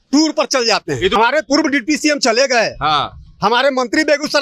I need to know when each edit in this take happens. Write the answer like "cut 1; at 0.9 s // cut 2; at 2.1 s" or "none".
cut 1; at 1.2 s